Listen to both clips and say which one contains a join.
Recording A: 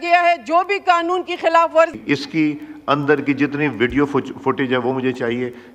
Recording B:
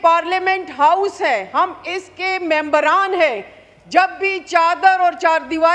A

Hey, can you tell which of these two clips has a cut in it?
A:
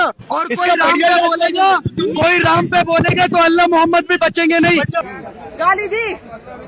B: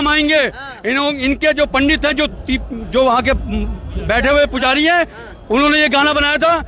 A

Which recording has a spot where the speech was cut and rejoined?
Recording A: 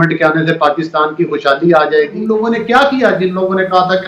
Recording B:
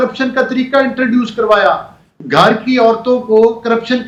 A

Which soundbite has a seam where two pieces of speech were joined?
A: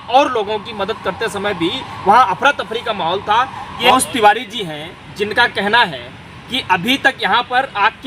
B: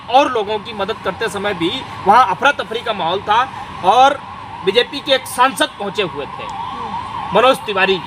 A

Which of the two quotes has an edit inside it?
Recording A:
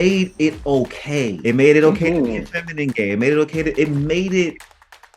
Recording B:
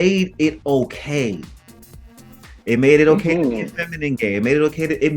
A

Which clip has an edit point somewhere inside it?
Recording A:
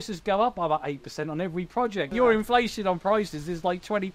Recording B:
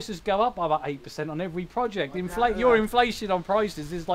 A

